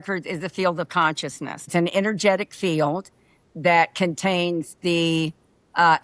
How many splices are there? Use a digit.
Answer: 1